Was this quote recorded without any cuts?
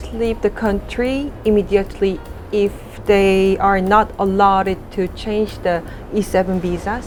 yes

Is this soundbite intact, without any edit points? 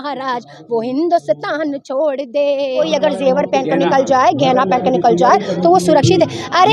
no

